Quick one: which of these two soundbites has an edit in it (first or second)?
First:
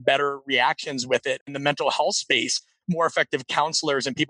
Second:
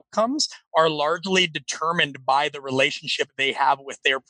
first